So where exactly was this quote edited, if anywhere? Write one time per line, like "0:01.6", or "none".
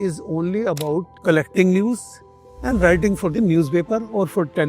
0:01.1